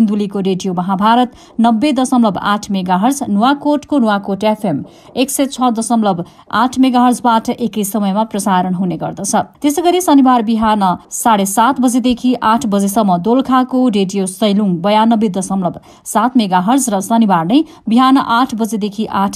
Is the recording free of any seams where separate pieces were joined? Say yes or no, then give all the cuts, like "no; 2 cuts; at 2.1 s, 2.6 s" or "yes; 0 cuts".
yes; 0 cuts